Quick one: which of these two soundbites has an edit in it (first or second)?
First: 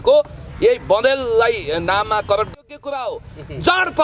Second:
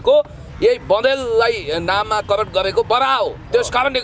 first